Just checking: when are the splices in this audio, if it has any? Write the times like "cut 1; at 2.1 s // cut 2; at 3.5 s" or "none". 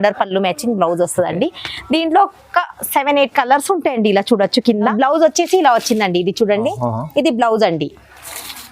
cut 1; at 4.9 s